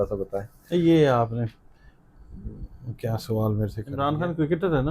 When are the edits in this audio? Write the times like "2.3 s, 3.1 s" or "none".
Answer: 3.8 s